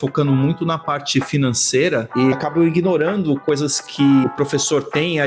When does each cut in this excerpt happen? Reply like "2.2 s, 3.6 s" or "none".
2.3 s, 4.2 s